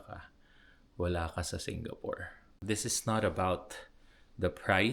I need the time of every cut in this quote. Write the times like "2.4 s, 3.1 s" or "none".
2.5 s